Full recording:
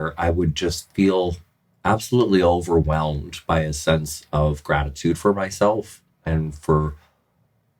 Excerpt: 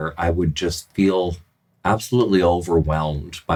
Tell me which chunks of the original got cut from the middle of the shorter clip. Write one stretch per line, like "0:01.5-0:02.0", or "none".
none